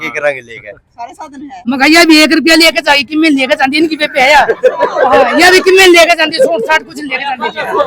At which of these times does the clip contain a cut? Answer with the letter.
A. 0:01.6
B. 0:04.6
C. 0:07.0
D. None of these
A